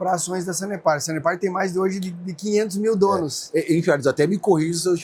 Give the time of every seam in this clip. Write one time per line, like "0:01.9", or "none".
none